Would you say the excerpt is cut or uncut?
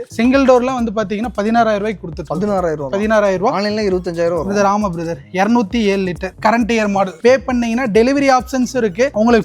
cut